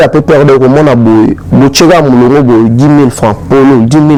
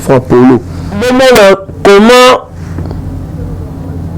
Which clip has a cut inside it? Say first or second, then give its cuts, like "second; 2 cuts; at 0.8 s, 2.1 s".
second; 1 cut; at 1.0 s